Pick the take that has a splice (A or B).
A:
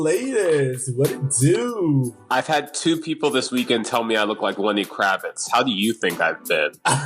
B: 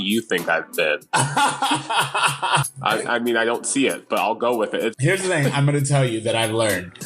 B